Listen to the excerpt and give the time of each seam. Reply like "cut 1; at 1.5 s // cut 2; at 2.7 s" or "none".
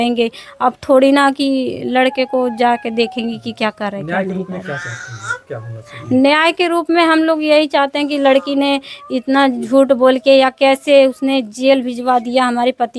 none